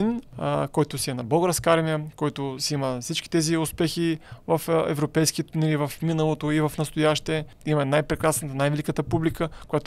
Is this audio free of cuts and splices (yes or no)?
yes